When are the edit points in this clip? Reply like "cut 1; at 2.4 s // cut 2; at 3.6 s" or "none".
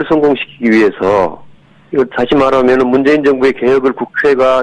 none